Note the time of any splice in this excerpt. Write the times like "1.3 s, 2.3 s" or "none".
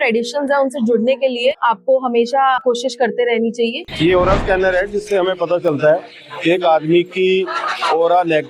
1.6 s, 2.6 s, 3.8 s